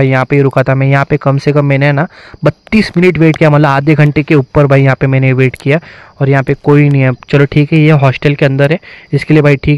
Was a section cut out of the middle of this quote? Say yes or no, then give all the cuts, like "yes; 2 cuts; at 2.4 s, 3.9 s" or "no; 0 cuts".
no; 0 cuts